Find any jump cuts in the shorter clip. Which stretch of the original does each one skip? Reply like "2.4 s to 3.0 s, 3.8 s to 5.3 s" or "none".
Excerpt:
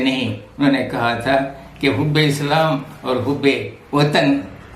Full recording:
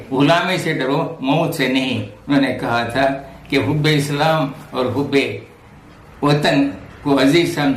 5.4 s to 6.0 s